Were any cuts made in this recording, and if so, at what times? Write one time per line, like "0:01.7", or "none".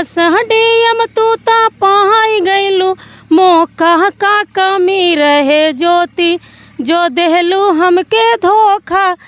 none